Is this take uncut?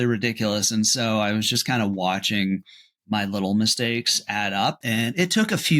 no; 1 cut; at 4.8 s

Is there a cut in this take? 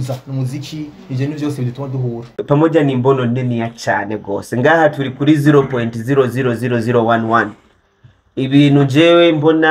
yes; 1 cut; at 2.3 s

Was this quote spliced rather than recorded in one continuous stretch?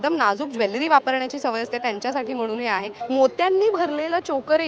yes; 1 cut; at 2.9 s

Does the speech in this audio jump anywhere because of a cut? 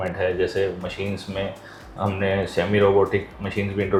no; 0 cuts

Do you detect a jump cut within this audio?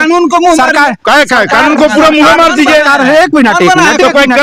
no; 0 cuts

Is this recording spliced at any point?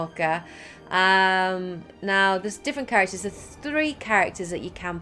yes; 1 cut; at 1.1 s

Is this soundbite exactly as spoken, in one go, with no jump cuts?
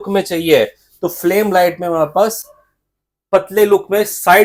yes; 0 cuts

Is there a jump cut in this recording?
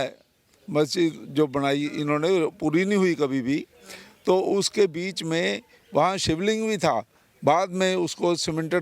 yes; 1 cut; at 5.7 s

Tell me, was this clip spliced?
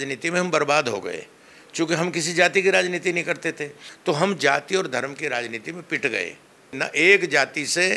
yes; 2 cuts; at 3.9 s, 6.8 s

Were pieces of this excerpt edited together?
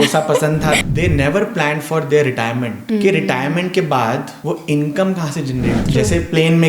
yes; 4 cuts; at 0.8 s, 2.8 s, 4.3 s, 5.9 s

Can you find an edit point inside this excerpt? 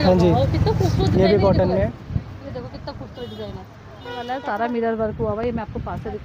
yes; 1 cut; at 4.3 s

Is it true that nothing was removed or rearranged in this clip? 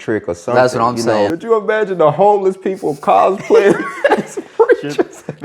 no; 1 cut; at 1.3 s

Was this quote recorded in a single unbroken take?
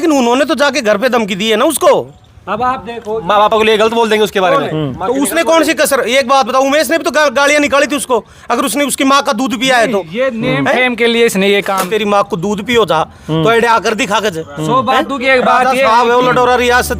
no; 1 cut; at 11.8 s

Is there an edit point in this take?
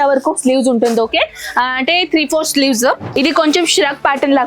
yes; 1 cut; at 3.2 s

